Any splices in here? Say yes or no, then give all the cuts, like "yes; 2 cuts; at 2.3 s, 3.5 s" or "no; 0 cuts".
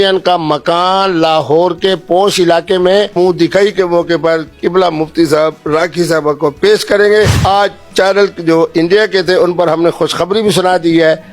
yes; 2 cuts; at 3.1 s, 7.4 s